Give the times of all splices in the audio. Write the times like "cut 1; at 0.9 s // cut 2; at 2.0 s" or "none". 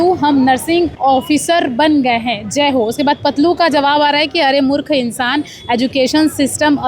cut 1; at 0.9 s